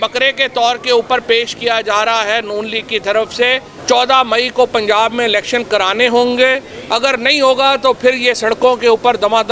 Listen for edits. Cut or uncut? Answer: cut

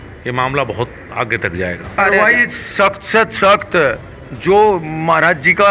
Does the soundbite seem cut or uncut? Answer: cut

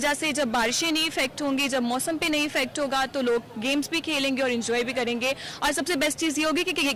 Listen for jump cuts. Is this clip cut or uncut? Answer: uncut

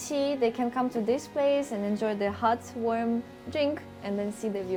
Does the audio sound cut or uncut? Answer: uncut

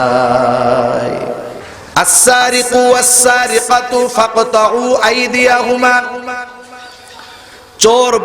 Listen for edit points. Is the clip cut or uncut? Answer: cut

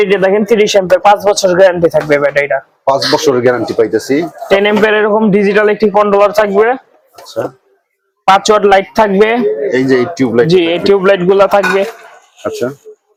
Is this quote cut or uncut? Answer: uncut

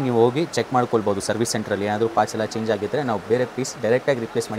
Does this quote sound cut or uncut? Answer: uncut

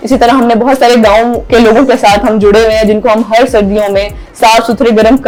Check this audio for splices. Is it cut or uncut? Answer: uncut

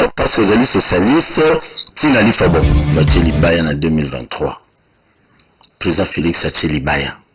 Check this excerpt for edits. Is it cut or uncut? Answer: cut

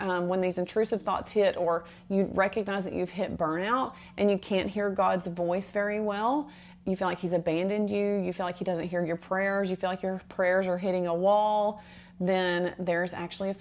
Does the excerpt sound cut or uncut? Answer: uncut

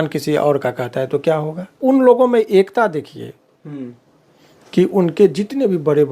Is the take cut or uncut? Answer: cut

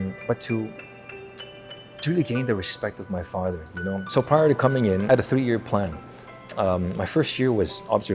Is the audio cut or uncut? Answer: cut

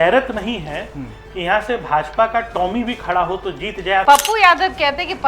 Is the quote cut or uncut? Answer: cut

